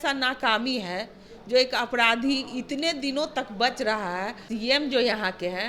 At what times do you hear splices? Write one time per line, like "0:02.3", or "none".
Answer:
0:04.4